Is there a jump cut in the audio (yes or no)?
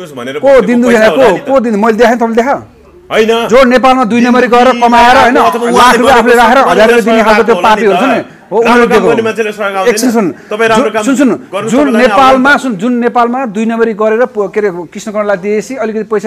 no